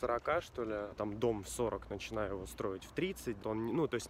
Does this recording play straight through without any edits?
no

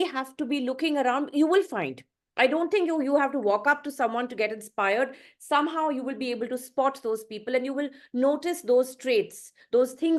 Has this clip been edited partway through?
no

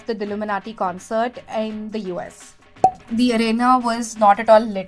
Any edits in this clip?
yes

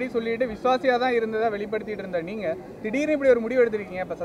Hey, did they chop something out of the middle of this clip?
no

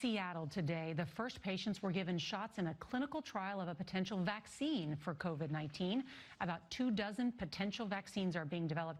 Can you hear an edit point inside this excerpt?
no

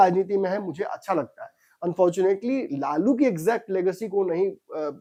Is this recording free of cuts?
yes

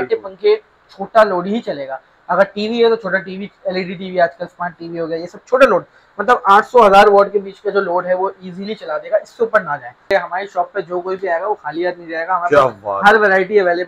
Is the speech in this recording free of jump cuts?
no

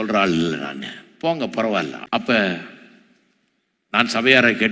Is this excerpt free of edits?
no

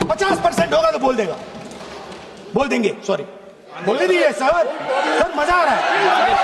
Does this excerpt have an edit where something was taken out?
yes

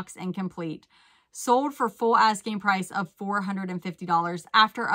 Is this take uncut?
yes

